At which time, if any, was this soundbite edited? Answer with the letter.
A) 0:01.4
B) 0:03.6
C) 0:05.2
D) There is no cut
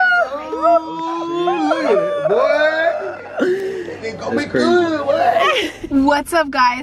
D